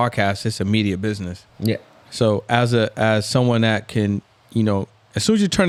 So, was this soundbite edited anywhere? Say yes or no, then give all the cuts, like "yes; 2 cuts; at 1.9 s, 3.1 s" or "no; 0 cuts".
no; 0 cuts